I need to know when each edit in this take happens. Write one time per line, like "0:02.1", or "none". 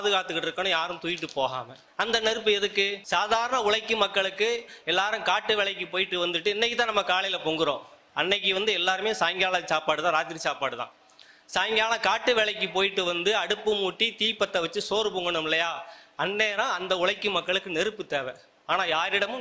0:01.8
0:03.0